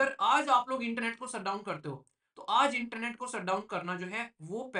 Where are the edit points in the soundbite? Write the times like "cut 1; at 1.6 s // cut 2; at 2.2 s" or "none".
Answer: none